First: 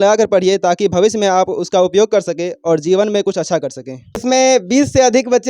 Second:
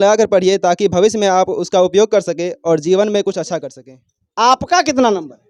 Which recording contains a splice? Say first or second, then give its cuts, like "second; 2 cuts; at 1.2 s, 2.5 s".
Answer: first; 1 cut; at 4.2 s